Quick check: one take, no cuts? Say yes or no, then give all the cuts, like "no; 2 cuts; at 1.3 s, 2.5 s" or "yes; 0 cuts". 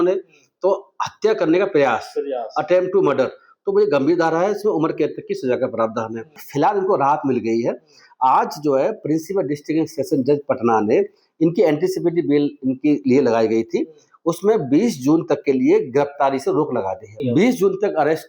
no; 2 cuts; at 6.4 s, 17.2 s